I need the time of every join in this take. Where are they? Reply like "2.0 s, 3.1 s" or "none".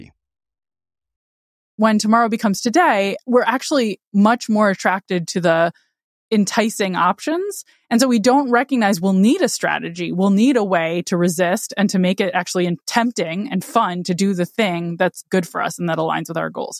1.8 s, 3.2 s